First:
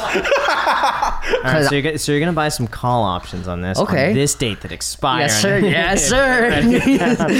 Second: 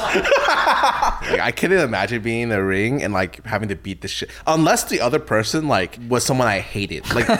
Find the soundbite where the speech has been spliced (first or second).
second